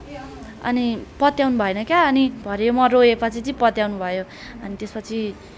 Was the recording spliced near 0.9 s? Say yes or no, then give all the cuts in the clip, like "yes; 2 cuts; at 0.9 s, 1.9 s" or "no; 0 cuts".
no; 1 cut; at 2.4 s